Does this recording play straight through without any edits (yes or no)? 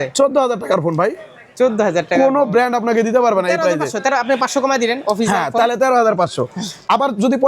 yes